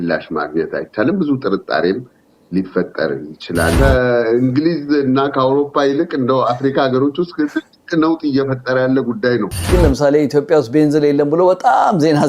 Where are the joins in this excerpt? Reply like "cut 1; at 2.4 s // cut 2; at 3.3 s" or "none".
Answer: cut 1; at 3.8 s // cut 2; at 9.6 s